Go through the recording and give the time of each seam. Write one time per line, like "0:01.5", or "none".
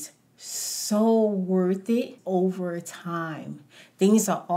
0:02.2